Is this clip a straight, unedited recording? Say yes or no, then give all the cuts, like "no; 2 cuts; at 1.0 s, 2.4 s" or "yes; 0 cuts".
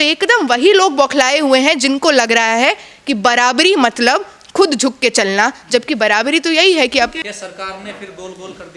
no; 1 cut; at 7.2 s